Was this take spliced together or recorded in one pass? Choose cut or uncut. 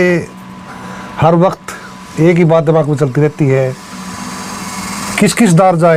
uncut